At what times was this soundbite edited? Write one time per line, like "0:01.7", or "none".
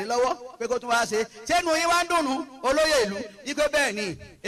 none

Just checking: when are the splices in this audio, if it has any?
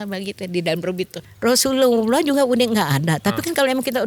0:01.2

